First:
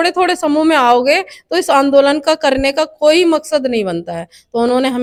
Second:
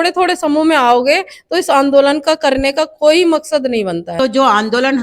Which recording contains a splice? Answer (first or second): second